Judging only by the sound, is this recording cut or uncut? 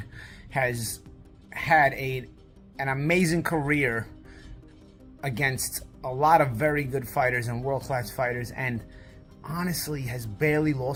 uncut